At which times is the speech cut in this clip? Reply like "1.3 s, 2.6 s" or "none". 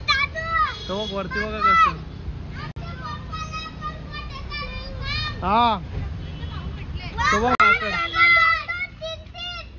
none

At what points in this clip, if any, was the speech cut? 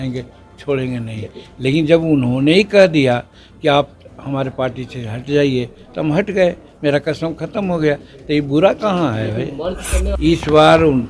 10.1 s

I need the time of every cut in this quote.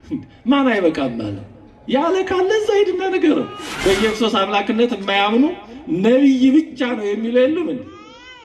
3.6 s

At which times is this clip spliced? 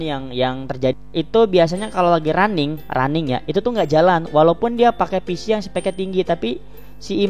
1.0 s

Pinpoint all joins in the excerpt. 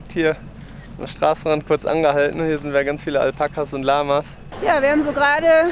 4.4 s

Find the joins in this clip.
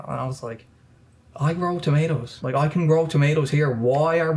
2.5 s

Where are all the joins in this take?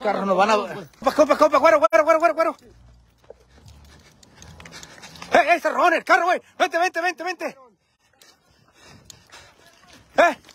1.0 s

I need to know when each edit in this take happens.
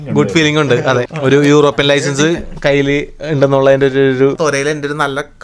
1.1 s, 4.4 s

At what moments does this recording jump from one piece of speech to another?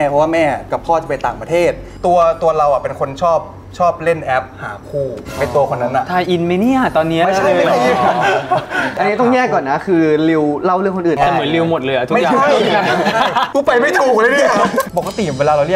1.9 s, 14.9 s

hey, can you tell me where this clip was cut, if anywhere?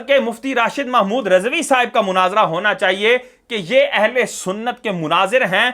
none

